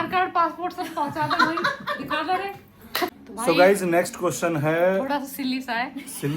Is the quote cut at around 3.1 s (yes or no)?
yes